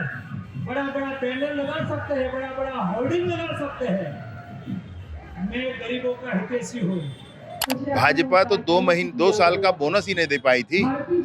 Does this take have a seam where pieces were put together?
yes; 1 cut; at 7.6 s

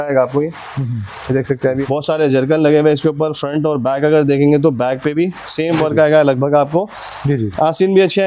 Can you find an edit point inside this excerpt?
yes; 1 cut; at 1.8 s

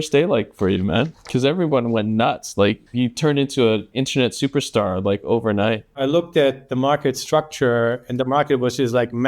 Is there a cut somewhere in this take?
yes; 3 cuts; at 1.2 s, 2.8 s, 5.9 s

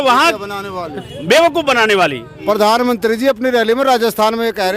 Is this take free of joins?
no; 1 cut; at 2.3 s

